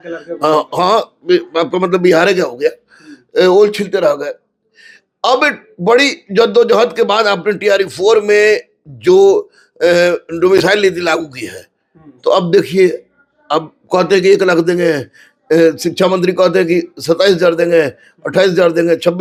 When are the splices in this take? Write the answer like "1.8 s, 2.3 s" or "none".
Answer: none